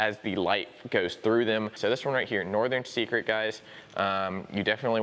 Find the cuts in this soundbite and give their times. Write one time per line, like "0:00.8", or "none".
0:01.7